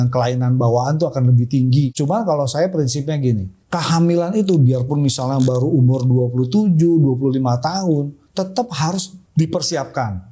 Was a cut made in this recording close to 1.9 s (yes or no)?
yes